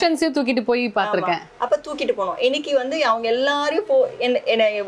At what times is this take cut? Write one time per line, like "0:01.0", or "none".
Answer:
none